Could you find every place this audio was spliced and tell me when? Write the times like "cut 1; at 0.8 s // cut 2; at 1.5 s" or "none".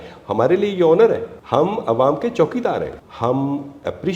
cut 1; at 1.3 s // cut 2; at 3.0 s